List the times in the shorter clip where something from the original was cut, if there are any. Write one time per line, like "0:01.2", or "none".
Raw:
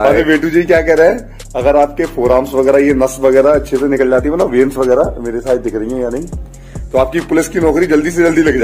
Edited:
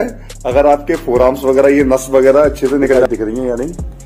0:03.0